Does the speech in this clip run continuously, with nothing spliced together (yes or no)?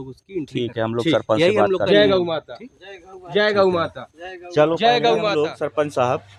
yes